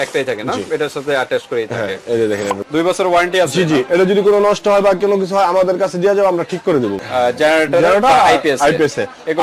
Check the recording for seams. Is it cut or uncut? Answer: cut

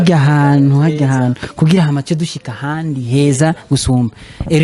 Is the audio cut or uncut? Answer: uncut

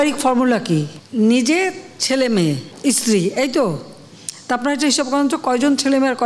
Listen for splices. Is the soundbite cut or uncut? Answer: cut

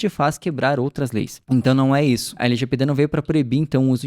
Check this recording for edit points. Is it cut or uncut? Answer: cut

